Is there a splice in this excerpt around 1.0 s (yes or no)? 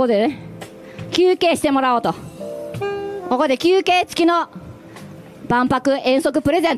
no